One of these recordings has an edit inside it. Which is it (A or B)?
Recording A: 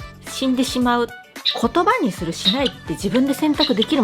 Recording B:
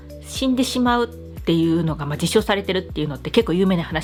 A